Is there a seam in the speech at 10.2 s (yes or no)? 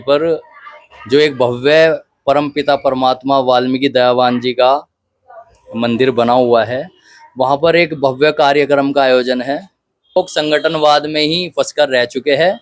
yes